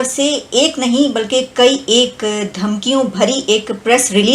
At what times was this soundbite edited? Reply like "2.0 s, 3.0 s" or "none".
none